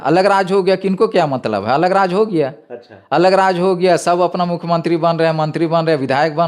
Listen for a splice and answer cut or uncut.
uncut